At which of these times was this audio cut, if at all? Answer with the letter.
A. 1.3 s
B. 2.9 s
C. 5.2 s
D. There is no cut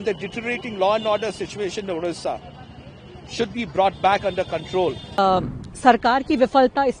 C